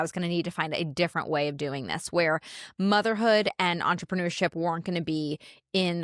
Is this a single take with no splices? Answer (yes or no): yes